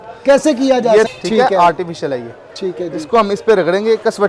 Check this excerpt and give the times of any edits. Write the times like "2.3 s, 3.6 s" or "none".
1.1 s